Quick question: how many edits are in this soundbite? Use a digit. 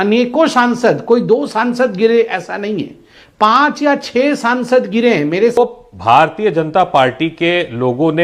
1